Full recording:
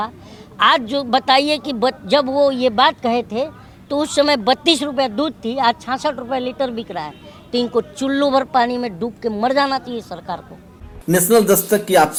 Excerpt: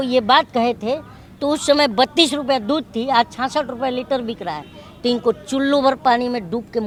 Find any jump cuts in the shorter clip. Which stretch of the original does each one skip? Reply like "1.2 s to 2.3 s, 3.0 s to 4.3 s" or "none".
none